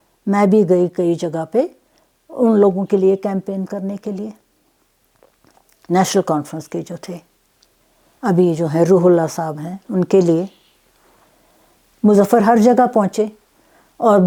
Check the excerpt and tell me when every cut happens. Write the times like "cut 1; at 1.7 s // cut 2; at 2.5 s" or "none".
none